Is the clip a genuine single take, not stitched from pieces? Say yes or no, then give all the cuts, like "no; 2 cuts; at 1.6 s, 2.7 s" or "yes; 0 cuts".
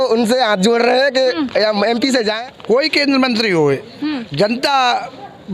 no; 1 cut; at 2.4 s